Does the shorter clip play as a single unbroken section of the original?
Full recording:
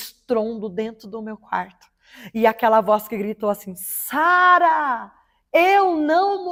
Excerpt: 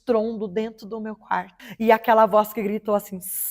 no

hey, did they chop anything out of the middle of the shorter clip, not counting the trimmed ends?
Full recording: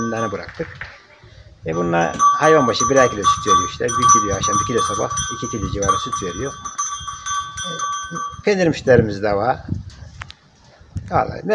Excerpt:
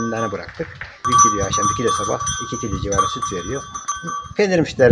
yes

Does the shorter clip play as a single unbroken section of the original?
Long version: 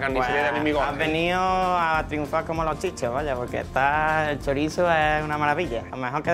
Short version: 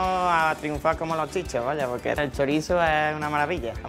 no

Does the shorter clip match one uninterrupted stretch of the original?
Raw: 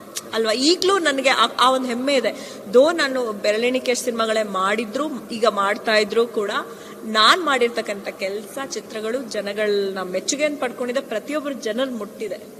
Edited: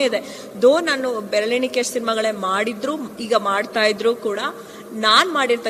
yes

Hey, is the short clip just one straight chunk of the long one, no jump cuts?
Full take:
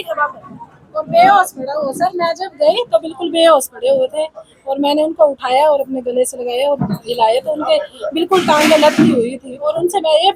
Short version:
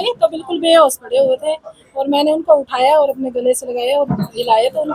yes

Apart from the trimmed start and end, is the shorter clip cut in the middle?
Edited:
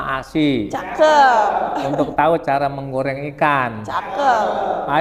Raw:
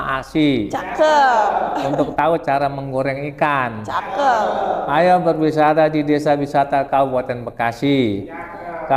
no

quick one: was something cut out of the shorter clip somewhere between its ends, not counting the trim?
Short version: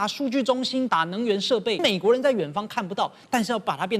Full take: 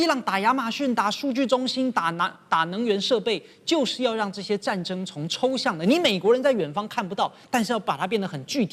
yes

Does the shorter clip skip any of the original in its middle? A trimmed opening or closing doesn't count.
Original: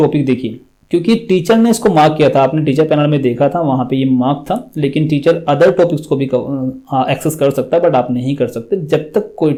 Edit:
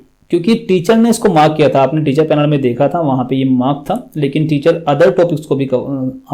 no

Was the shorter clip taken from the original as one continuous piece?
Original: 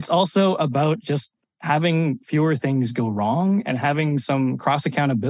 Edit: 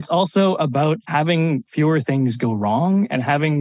no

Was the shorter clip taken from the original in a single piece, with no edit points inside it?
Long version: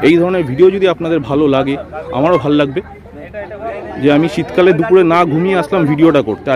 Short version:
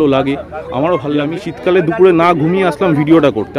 no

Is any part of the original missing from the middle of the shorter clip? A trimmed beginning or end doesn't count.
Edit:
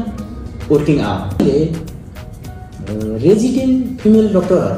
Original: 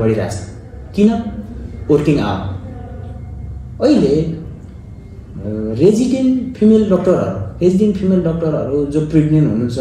yes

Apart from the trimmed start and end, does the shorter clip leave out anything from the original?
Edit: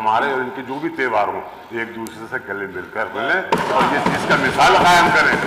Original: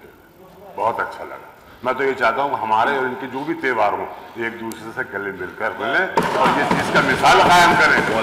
no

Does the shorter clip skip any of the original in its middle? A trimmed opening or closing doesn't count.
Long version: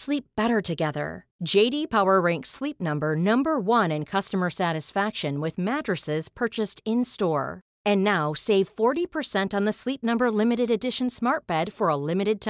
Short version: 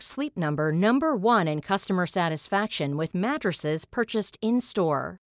no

